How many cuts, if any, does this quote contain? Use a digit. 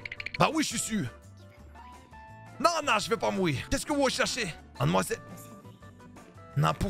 1